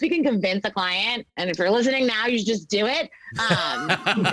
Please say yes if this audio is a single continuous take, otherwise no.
yes